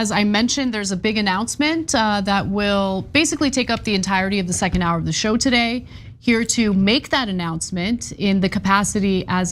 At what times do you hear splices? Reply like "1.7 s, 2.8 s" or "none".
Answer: none